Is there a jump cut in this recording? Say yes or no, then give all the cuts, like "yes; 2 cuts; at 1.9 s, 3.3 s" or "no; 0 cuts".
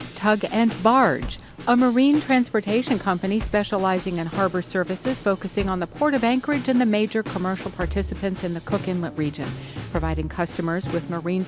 no; 0 cuts